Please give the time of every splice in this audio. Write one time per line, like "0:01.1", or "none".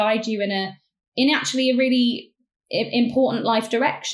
none